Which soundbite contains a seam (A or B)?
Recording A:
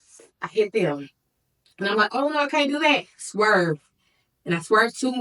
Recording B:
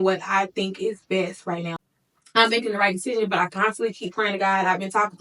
B